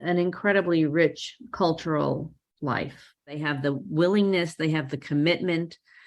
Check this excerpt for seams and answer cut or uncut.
cut